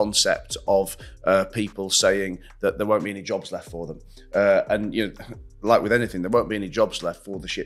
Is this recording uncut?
yes; 0 cuts

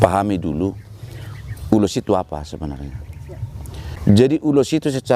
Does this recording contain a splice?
yes; 1 cut; at 4.0 s

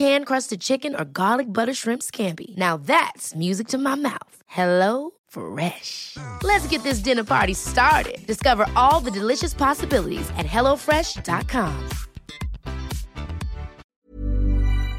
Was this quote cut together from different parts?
yes; 1 cut; at 13.8 s

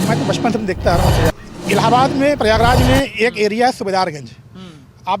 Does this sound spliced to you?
yes; 1 cut; at 1.3 s

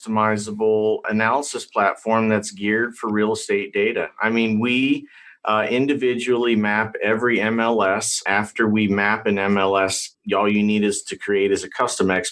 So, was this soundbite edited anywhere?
yes; 3 cuts; at 1.0 s, 8.2 s, 10.1 s

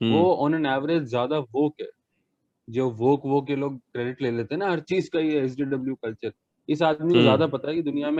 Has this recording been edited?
no; 0 cuts

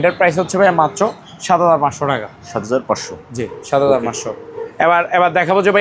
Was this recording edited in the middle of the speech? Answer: no; 0 cuts

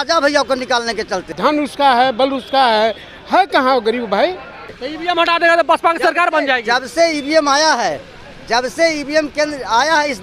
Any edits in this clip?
yes; 2 cuts; at 1.3 s, 4.8 s

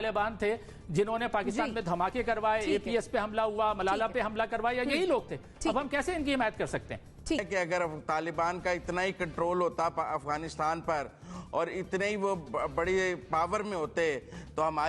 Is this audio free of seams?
yes; 0 cuts

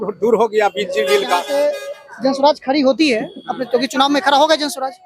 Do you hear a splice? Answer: yes; 1 cut; at 1.5 s

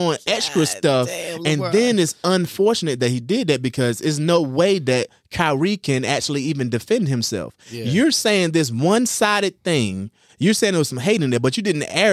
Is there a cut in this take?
no; 0 cuts

